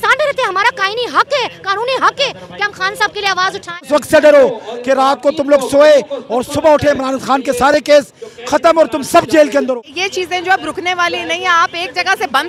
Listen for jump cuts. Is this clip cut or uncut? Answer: cut